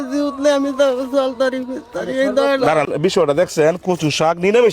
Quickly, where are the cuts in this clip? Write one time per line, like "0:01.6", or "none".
0:02.9